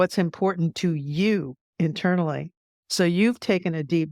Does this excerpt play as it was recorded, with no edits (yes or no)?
yes